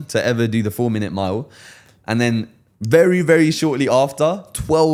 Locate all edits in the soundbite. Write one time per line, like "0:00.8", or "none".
none